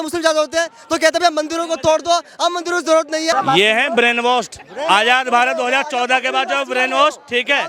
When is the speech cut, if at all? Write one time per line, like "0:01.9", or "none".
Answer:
0:03.3